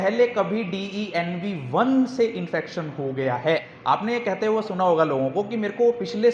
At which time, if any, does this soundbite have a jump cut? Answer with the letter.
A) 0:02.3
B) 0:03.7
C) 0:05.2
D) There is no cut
B